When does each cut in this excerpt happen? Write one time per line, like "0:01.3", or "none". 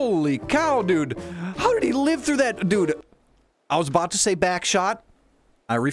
none